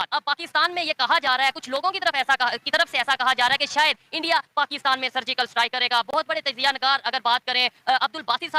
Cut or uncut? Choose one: uncut